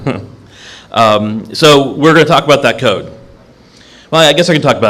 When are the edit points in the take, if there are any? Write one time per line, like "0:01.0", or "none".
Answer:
0:01.2